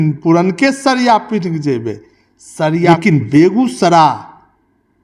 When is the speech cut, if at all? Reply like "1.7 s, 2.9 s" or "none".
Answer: 2.9 s